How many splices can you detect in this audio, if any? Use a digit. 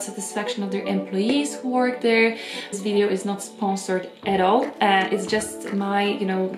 1